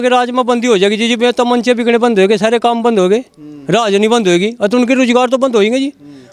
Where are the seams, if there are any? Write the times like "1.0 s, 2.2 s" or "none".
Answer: none

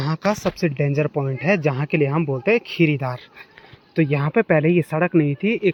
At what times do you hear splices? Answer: none

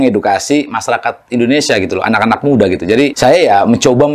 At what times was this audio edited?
3.1 s

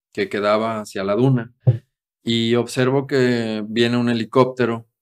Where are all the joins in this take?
1.5 s

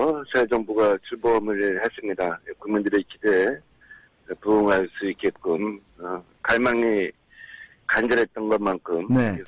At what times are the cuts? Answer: 7.3 s

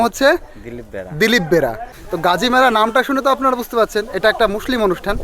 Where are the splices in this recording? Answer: 2.0 s

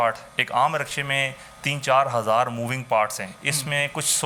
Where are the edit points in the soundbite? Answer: none

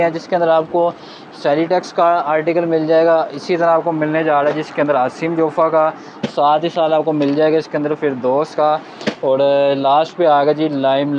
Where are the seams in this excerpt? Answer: none

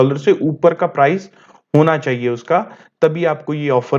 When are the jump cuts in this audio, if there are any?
none

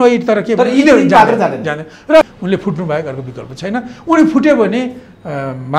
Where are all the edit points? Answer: 2.2 s

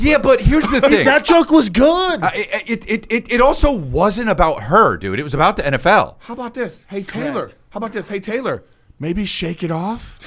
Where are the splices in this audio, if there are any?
none

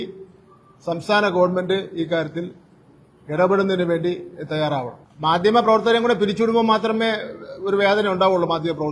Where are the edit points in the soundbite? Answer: 5.0 s

